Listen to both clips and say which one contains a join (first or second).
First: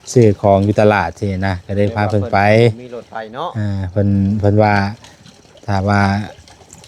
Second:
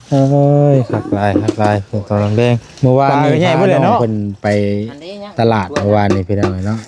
second